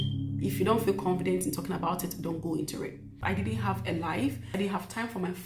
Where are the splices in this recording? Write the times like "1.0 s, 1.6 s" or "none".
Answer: 3.1 s, 4.5 s